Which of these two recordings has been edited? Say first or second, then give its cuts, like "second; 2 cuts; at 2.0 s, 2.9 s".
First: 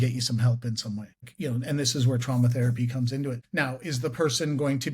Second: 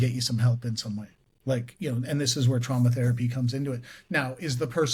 first; 2 cuts; at 1.3 s, 3.4 s